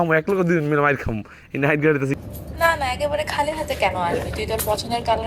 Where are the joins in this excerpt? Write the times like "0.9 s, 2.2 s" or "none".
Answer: 2.2 s